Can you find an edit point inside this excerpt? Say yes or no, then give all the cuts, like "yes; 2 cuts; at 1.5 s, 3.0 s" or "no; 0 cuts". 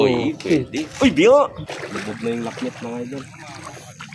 yes; 1 cut; at 1.6 s